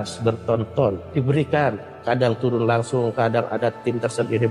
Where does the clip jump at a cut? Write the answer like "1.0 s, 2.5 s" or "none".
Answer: 1.0 s